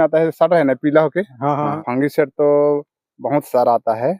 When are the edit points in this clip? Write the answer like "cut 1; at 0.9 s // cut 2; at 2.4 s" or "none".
cut 1; at 1.8 s

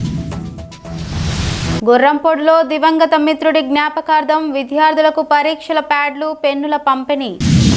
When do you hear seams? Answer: cut 1; at 1.8 s

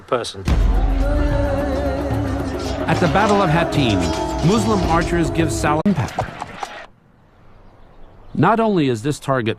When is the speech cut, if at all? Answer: none

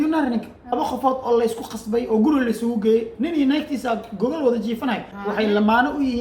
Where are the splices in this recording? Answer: cut 1; at 0.7 s // cut 2; at 5.1 s

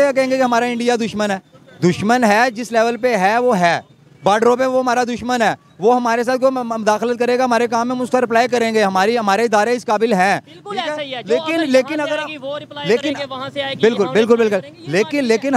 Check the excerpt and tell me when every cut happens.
none

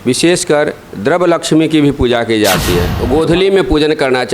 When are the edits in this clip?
cut 1; at 2.9 s

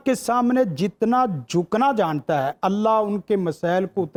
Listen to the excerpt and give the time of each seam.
none

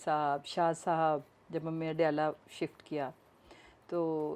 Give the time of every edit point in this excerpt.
cut 1; at 1.4 s

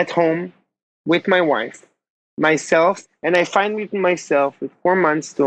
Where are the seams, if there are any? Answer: cut 1; at 3.0 s

